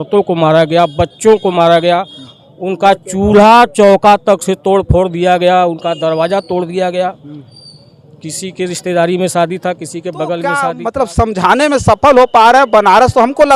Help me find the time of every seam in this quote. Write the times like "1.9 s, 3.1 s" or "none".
10.6 s